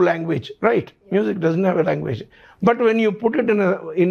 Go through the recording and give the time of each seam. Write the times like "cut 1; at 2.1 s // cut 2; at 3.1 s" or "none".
none